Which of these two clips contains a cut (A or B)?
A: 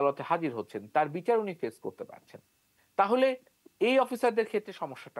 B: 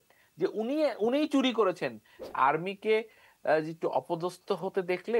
B